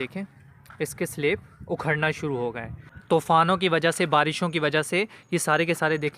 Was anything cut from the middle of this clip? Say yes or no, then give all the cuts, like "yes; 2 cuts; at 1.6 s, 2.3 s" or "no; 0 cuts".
yes; 1 cut; at 2.9 s